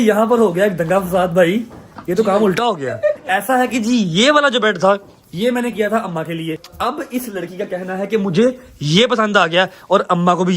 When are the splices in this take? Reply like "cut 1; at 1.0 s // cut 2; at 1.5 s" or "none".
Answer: cut 1; at 3.2 s // cut 2; at 6.7 s